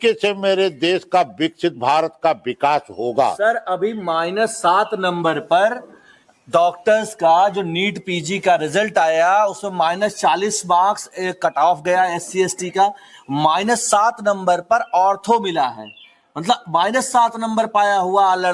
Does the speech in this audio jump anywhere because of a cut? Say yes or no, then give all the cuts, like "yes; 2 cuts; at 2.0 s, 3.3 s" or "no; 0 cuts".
no; 0 cuts